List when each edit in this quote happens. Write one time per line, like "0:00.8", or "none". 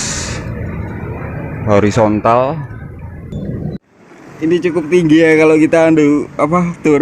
0:03.3